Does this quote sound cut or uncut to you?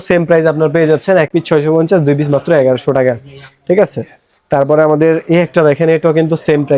uncut